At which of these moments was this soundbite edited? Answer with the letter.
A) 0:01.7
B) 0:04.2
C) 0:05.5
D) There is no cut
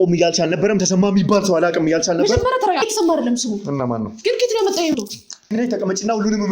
C